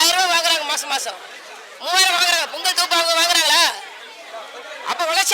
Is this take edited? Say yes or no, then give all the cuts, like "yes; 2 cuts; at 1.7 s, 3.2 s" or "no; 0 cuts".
no; 0 cuts